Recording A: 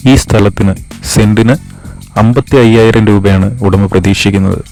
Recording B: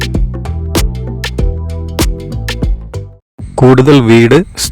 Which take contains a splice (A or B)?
B